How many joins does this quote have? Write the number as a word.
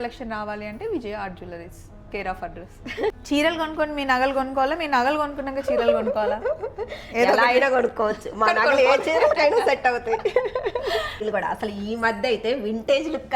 two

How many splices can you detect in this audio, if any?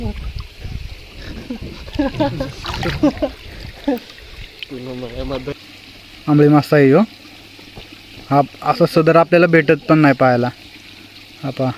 one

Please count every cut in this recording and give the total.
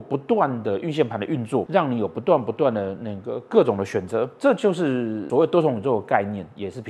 three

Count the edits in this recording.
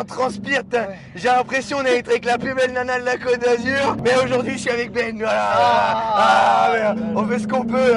zero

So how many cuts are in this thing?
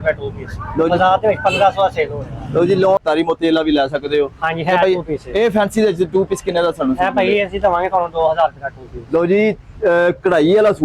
one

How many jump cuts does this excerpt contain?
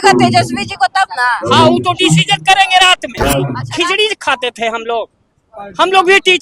one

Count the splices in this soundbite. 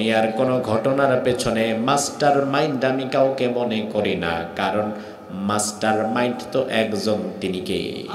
zero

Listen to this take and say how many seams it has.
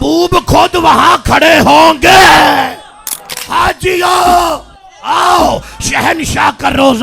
one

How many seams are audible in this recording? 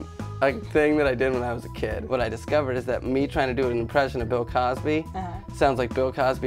one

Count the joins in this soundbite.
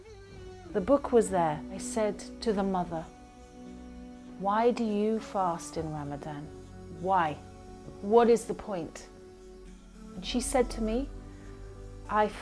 one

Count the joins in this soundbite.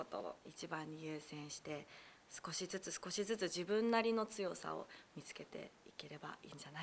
zero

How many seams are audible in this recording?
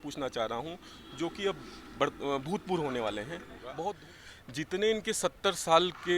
one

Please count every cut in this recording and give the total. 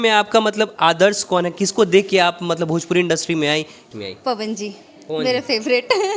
one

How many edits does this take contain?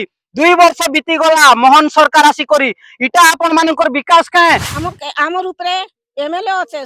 one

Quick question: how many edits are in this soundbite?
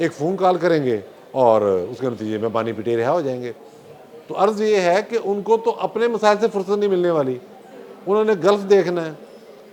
zero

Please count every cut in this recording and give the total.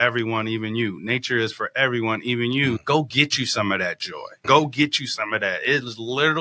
two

